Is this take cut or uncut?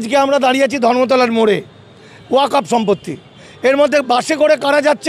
uncut